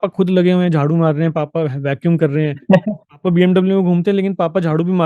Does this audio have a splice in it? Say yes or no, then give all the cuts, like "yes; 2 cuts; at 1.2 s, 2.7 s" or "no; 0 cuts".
no; 0 cuts